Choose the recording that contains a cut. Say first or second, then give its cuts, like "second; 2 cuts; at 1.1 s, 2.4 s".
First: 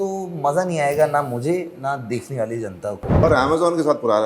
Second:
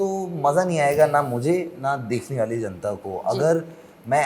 first; 1 cut; at 3.2 s